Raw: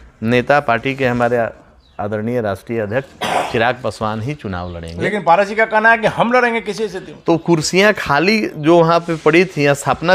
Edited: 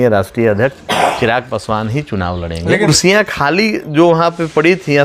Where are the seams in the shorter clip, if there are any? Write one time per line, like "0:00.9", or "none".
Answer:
0:02.9

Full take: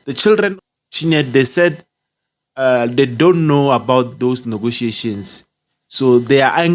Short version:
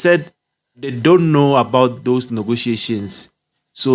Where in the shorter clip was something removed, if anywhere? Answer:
0:01.0

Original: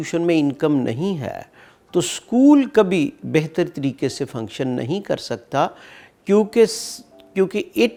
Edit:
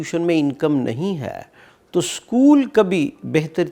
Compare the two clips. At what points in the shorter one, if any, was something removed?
none

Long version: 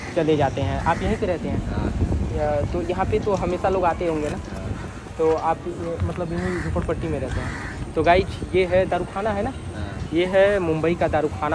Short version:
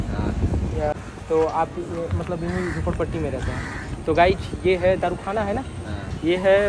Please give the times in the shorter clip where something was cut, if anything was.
0:00.9

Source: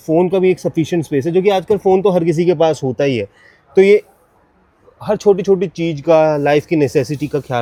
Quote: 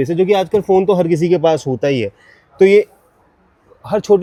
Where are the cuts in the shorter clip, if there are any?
none

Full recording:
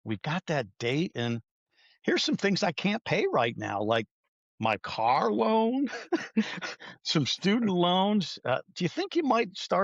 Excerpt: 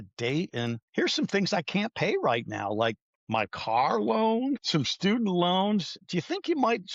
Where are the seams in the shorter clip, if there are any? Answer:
0:00.8
0:03.1
0:04.6
0:06.0

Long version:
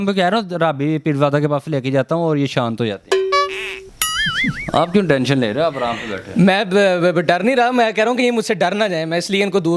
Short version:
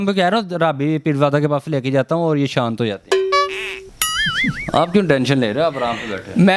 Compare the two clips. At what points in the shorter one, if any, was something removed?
none

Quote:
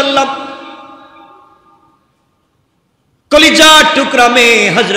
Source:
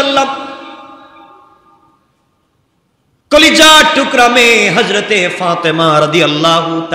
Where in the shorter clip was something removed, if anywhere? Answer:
none

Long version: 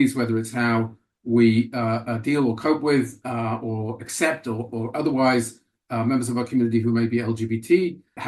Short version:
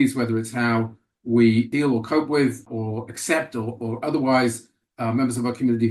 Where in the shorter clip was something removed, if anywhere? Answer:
0:01.7
0:02.7

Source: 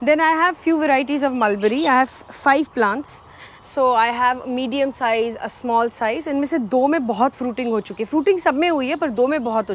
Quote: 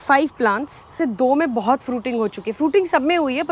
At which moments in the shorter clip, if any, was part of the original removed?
0:01.0

